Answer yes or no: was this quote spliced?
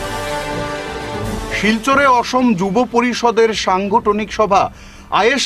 no